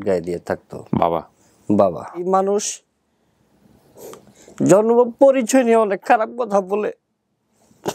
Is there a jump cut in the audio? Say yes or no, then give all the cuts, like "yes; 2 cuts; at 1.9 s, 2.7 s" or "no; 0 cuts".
yes; 1 cut; at 2.2 s